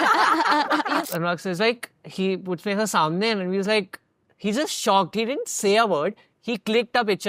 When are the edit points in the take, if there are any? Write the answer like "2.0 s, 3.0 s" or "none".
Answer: 1.1 s